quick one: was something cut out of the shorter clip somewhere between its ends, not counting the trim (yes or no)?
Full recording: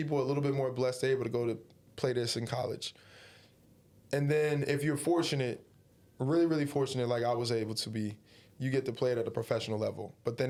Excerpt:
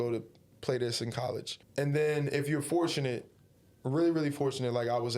yes